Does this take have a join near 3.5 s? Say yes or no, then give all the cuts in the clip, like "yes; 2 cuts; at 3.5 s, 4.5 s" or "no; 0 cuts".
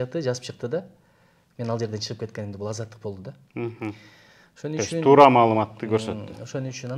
no; 0 cuts